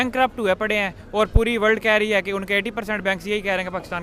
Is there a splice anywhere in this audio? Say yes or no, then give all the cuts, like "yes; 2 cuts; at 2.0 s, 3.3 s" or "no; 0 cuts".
no; 0 cuts